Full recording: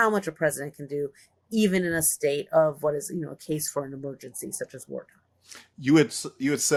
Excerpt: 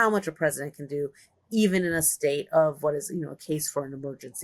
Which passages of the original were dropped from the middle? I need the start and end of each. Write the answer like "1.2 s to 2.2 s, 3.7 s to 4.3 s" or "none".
none

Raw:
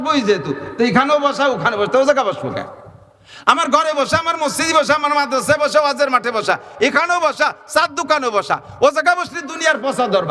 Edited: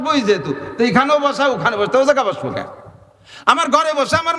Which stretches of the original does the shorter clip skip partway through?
none

